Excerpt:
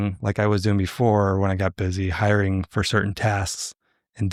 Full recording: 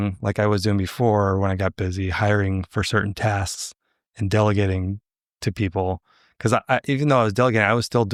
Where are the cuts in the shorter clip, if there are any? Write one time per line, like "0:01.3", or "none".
none